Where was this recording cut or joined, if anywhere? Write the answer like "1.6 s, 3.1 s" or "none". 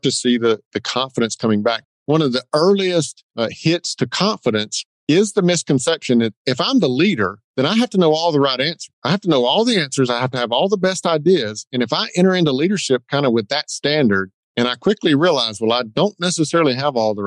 6.4 s